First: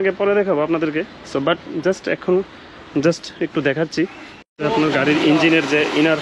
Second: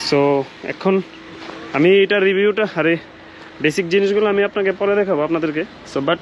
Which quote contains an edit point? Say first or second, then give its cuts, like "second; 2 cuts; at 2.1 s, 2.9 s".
first; 1 cut; at 4.5 s